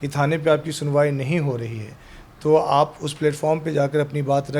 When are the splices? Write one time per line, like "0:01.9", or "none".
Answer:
none